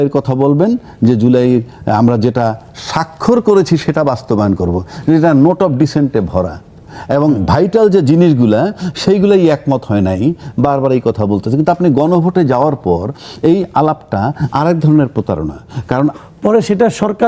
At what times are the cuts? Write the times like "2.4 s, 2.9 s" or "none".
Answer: 16.2 s